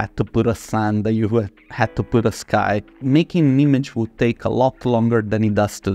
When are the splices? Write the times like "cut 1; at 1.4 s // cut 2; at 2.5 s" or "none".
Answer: cut 1; at 2.9 s